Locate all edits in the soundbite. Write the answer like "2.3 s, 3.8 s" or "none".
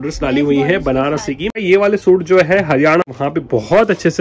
1.5 s, 3.1 s